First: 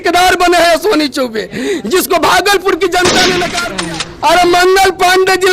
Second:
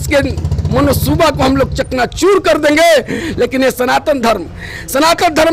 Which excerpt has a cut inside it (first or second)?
first